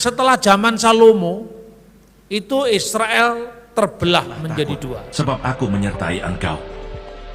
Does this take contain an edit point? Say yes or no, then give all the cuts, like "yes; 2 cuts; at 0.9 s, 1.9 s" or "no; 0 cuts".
yes; 1 cut; at 5.0 s